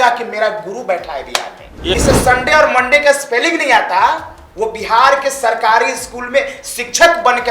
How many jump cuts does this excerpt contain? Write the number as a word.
one